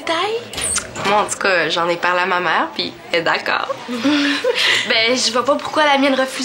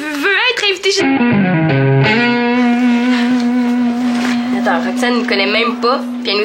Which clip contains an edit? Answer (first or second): second